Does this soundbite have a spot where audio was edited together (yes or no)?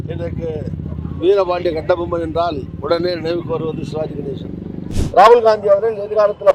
yes